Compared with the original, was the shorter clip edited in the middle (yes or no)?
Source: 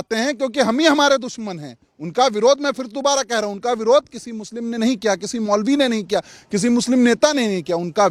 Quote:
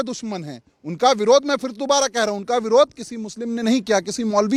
no